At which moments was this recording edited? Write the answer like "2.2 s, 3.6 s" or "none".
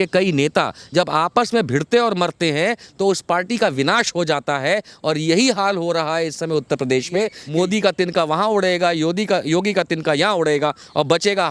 7.4 s